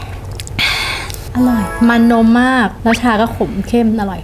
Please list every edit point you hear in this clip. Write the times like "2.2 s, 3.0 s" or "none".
1.2 s, 2.7 s